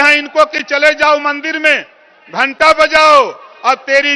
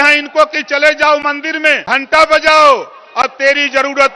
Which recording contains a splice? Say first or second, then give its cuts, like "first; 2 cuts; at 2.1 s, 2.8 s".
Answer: second; 1 cut; at 1.8 s